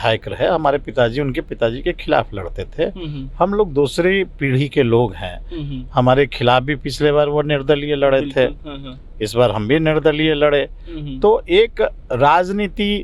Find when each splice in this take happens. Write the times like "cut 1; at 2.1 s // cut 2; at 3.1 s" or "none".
none